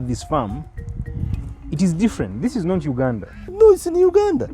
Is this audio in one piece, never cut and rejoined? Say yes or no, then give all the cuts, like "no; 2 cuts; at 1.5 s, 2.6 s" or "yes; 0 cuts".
no; 1 cut; at 3.5 s